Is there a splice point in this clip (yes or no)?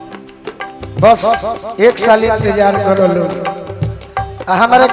no